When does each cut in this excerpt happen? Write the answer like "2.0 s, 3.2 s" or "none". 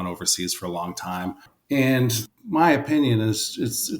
1.5 s, 2.3 s